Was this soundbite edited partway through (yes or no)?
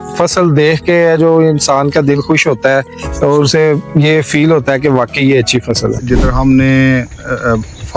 yes